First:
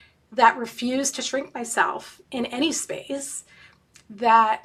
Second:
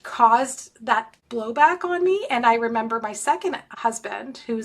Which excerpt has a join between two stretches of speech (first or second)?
second